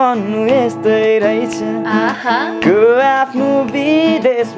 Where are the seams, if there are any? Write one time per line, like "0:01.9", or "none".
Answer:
none